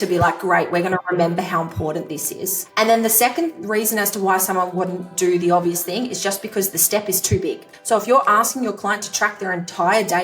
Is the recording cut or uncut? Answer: cut